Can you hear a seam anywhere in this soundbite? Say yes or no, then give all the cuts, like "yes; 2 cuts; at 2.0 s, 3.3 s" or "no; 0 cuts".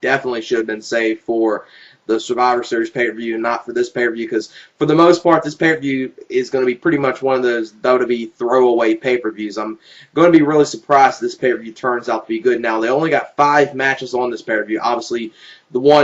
yes; 1 cut; at 14.4 s